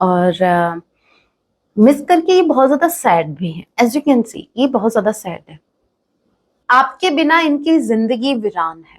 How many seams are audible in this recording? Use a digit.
1